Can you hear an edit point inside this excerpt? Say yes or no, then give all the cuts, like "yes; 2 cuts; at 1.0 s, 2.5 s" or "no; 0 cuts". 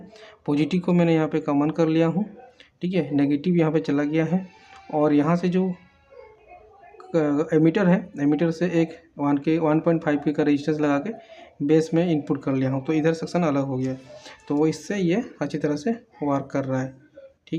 no; 0 cuts